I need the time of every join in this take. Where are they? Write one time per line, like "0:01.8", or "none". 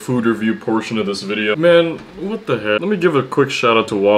0:02.8

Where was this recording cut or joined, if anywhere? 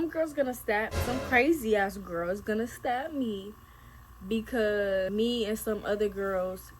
0:05.1

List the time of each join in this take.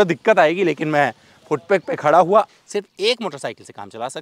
0:02.5

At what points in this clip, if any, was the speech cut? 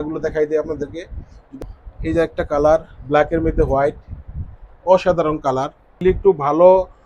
0:01.4
0:06.0

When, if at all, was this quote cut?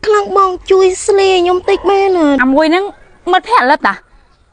0:02.4

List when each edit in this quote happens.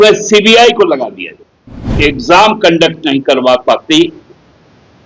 0:01.9

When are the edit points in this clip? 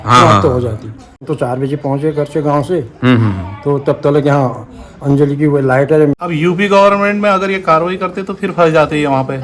0:01.2
0:06.2

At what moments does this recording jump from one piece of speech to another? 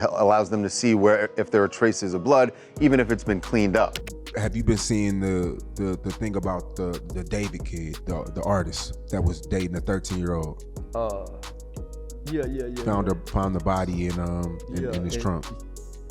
0:04.0

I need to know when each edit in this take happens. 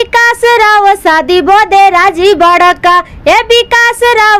none

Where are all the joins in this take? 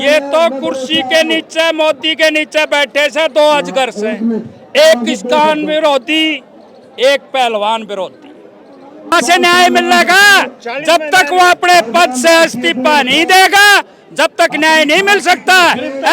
0:09.1

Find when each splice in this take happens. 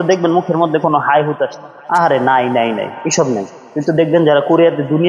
none

